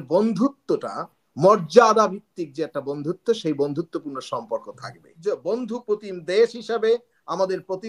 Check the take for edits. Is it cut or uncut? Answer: cut